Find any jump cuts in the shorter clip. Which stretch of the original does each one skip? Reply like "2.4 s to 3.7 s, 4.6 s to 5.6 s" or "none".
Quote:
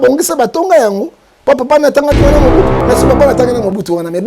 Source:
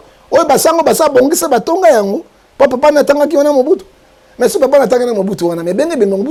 3.9 s to 4.3 s